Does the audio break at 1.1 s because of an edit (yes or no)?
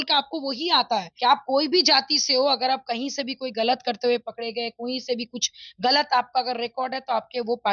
yes